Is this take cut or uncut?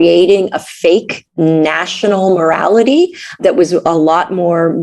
cut